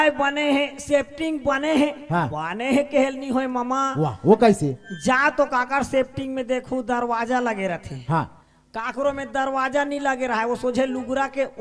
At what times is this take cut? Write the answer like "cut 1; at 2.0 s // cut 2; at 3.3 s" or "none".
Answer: none